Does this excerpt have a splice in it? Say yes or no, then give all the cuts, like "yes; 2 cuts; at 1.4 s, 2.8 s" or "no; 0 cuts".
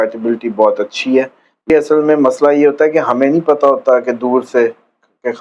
yes; 1 cut; at 1.7 s